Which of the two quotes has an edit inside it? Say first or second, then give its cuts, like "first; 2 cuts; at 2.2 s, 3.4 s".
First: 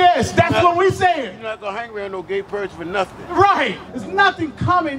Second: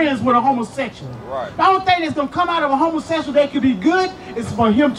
first; 1 cut; at 3.9 s